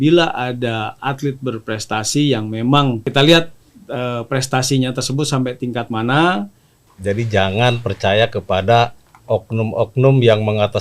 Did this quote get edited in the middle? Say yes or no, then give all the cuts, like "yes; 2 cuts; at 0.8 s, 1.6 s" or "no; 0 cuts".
yes; 2 cuts; at 3.1 s, 6.9 s